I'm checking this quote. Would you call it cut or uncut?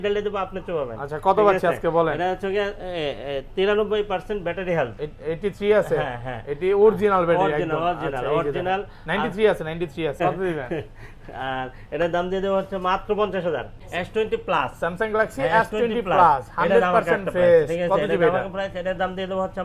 cut